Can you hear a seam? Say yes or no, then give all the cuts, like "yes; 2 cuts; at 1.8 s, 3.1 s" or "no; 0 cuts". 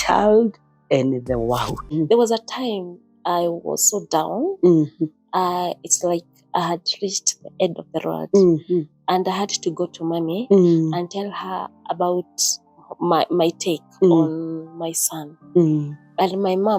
yes; 1 cut; at 1.9 s